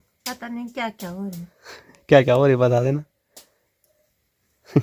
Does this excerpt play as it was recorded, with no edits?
yes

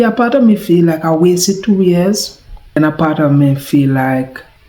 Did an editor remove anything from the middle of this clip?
yes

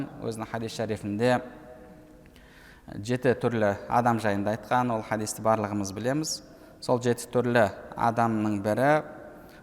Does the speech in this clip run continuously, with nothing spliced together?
yes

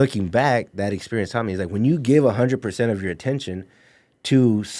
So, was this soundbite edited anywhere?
no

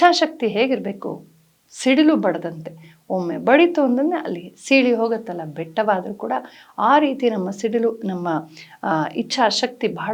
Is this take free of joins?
yes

